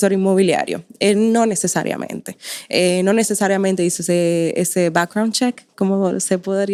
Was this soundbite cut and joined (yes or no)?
no